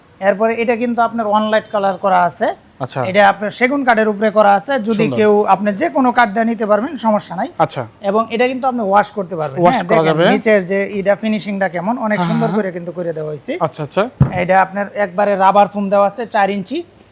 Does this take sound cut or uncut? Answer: uncut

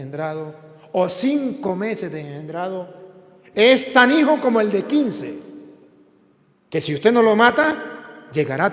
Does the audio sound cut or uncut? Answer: uncut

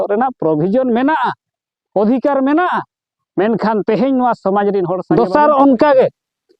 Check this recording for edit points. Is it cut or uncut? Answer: cut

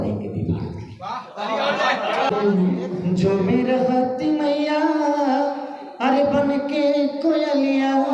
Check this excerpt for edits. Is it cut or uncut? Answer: cut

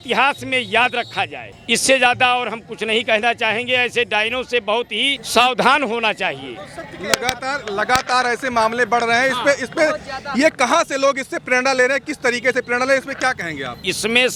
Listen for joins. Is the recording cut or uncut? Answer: uncut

